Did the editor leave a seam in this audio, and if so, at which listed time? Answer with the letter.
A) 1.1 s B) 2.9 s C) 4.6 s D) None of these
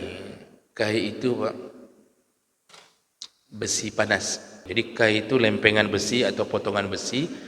C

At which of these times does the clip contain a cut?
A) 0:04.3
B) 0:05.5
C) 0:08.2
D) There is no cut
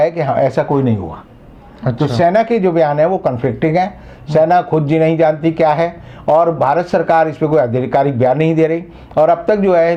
D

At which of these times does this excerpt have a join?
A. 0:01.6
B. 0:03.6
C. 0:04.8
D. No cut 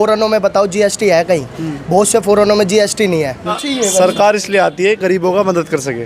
B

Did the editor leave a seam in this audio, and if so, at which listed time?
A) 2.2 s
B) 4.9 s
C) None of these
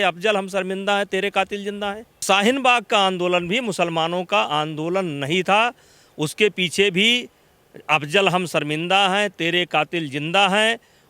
A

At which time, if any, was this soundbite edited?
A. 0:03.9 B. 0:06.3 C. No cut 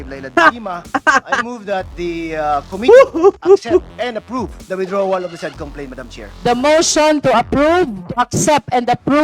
B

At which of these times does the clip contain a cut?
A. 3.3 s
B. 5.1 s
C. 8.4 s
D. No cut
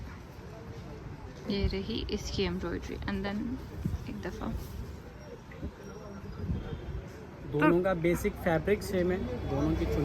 B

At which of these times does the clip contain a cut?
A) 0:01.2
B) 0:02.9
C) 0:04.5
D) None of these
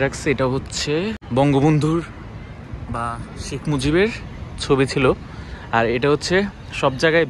A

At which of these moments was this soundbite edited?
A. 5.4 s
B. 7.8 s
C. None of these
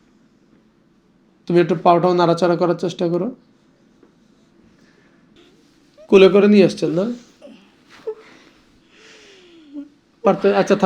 A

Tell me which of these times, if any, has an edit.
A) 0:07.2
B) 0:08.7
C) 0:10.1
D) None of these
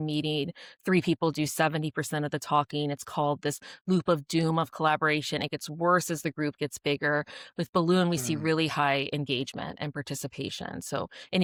D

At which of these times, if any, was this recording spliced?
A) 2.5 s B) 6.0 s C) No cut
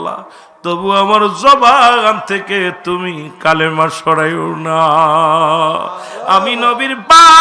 C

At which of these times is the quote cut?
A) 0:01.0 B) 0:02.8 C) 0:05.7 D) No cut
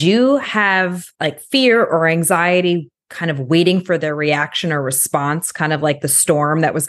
A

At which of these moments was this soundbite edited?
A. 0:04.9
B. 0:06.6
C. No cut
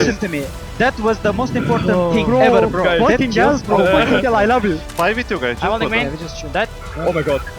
A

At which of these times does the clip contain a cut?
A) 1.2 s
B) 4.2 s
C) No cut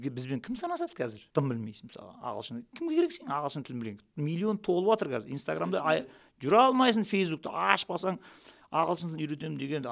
A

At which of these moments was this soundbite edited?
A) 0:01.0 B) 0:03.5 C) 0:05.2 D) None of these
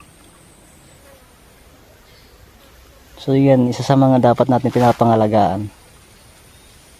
A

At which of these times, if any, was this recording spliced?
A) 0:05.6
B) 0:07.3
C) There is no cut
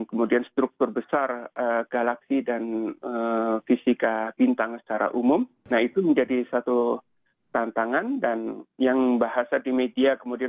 A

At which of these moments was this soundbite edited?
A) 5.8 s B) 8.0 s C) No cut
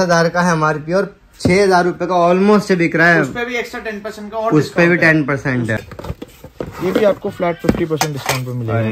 A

